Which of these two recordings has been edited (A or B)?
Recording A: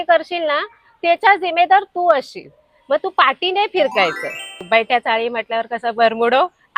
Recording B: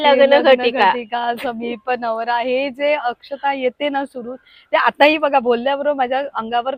A